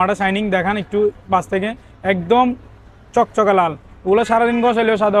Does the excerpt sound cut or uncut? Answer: uncut